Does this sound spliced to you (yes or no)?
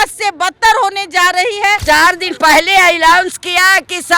yes